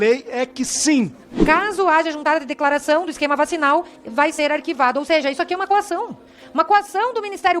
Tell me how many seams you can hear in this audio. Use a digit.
1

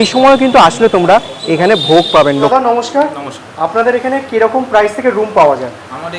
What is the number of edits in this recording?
1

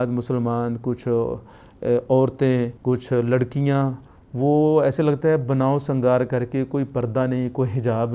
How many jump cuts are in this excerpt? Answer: 1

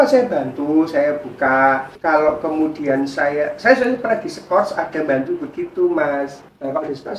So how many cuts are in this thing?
1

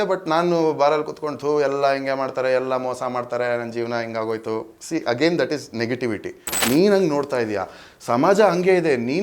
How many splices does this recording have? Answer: 1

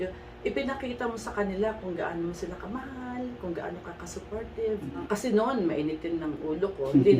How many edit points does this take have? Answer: 1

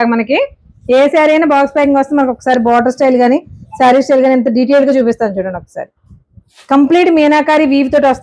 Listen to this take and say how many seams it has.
0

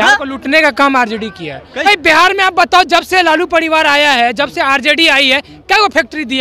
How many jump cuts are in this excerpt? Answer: 1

